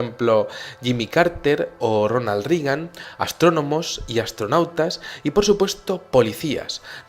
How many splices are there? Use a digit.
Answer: 1